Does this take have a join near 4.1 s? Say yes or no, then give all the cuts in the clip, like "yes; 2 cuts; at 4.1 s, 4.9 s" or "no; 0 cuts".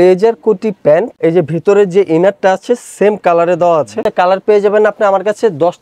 yes; 2 cuts; at 1.1 s, 4.1 s